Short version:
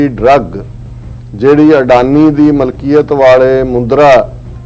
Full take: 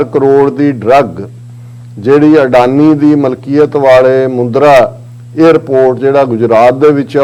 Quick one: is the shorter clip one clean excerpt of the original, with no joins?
yes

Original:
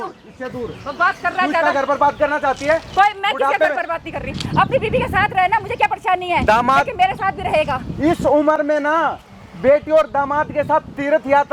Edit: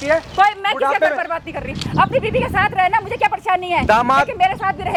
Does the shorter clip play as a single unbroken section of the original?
yes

